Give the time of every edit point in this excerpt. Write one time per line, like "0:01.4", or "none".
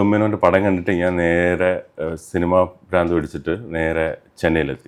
none

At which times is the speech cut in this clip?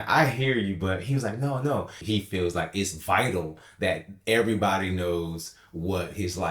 0:02.0

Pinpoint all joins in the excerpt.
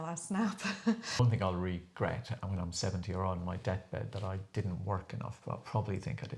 0:01.2

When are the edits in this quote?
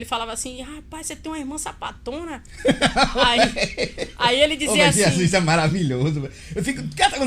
none

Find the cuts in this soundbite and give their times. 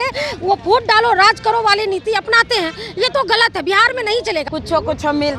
0:04.5

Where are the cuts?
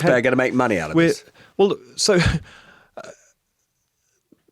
none

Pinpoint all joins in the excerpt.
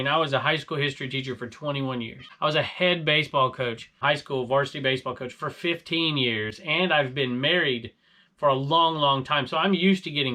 0:02.2
0:04.0

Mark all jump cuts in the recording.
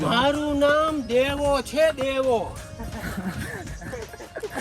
0:02.7

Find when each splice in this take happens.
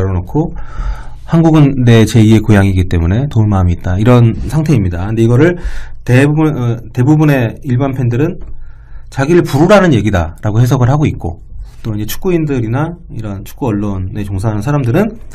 none

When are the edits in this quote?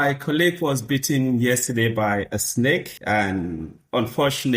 0:02.9

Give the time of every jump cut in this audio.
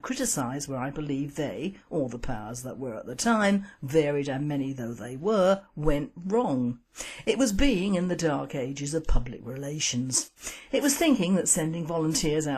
none

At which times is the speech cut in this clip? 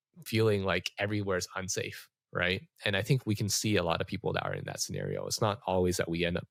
none

